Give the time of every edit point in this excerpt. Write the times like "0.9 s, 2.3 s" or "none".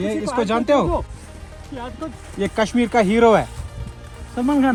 none